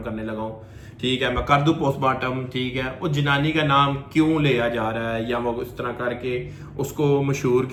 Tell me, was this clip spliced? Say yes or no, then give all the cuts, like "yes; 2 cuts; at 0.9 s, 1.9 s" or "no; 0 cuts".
no; 0 cuts